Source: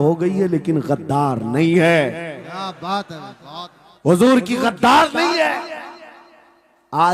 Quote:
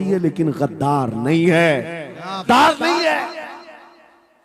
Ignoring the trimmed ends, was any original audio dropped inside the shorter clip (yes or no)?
yes